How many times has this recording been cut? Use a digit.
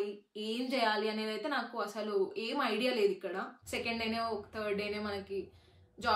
1